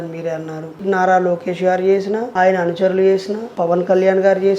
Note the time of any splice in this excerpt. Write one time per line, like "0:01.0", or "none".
0:00.8
0:02.3
0:03.4